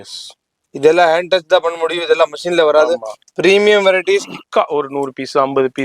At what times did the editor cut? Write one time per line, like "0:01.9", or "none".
0:04.4